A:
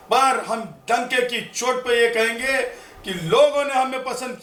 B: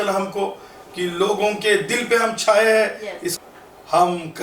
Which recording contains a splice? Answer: B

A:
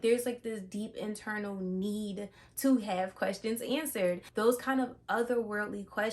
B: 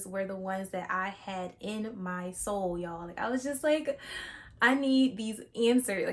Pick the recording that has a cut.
A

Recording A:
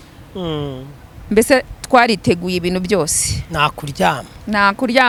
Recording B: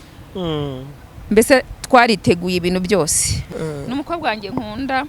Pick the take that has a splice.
B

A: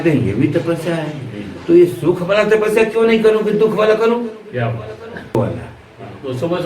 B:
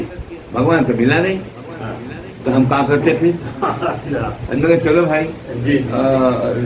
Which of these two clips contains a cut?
A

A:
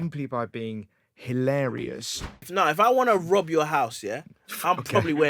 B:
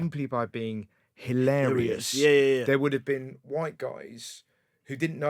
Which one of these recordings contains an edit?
A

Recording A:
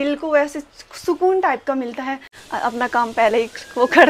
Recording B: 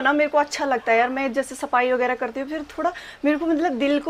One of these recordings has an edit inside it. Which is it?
A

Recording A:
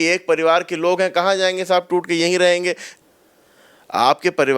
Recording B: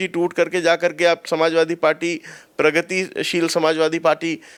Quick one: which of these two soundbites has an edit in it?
A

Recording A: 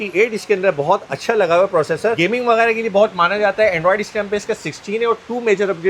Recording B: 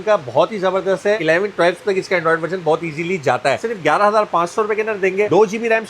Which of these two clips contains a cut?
B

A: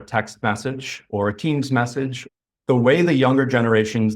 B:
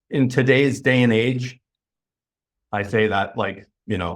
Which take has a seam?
A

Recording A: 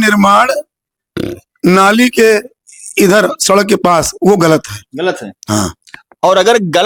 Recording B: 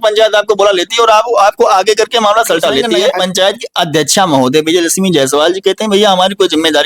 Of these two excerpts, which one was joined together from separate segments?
B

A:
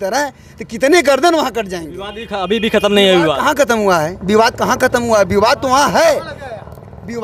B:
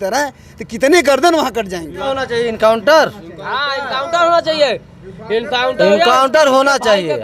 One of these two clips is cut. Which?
B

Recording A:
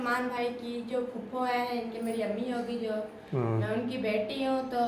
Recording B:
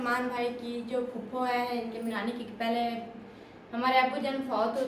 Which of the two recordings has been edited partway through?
B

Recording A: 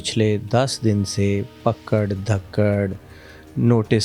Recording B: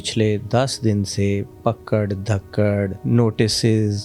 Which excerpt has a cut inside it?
B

